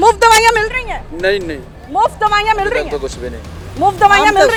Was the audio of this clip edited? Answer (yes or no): no